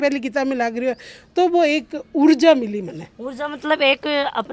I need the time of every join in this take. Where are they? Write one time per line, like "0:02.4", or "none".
none